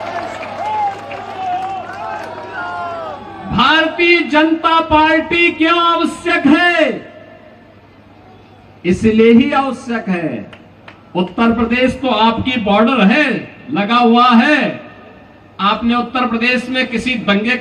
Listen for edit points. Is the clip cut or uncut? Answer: uncut